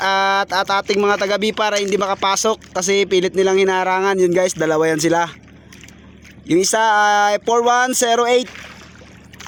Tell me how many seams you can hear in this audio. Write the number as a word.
zero